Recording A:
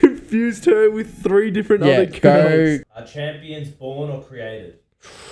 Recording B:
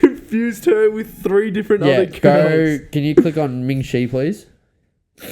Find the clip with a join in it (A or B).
A